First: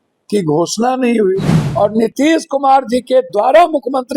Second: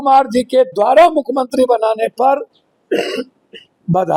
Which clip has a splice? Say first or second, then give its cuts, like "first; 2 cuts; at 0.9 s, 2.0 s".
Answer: first; 1 cut; at 1.6 s